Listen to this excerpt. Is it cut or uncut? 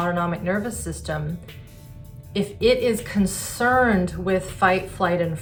uncut